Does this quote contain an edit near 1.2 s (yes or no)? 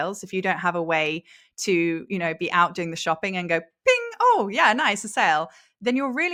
no